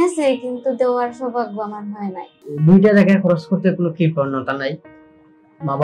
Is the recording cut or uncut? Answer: cut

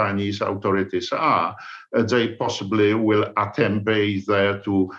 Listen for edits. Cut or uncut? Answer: uncut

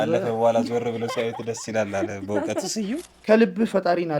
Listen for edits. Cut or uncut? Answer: cut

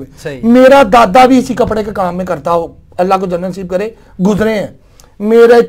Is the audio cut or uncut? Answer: uncut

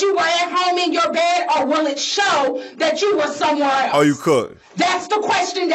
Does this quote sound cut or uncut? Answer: uncut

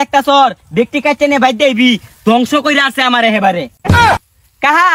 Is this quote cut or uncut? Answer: uncut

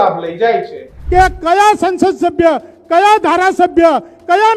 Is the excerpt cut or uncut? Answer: cut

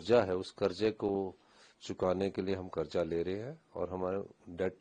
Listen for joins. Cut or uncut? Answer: uncut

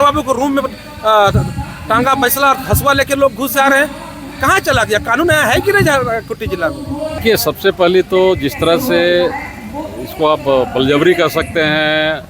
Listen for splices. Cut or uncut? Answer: cut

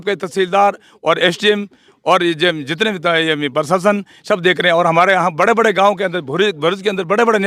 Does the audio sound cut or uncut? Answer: uncut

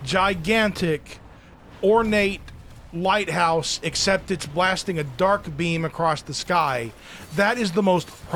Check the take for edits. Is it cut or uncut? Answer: uncut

